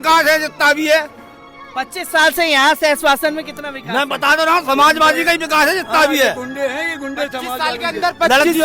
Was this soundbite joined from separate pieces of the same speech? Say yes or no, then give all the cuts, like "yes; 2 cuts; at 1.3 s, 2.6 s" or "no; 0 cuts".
no; 0 cuts